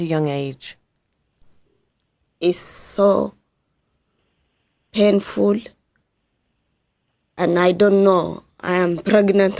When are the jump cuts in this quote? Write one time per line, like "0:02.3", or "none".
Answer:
0:06.5